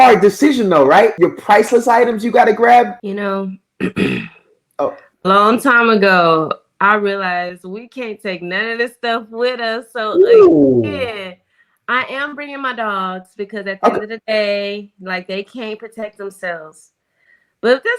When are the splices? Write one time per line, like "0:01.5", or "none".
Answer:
0:01.1
0:03.0